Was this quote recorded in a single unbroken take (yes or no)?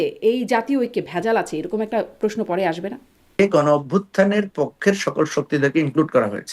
no